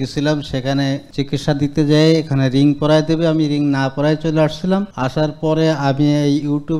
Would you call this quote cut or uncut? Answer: uncut